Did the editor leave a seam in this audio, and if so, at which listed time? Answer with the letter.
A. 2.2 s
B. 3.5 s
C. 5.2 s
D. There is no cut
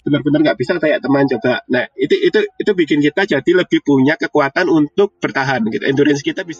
C